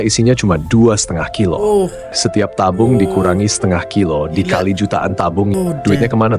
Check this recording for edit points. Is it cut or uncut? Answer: cut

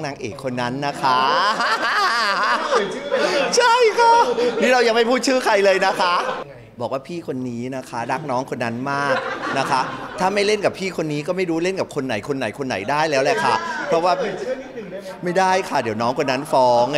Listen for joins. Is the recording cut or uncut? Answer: cut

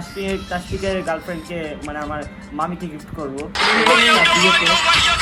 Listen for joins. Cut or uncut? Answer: uncut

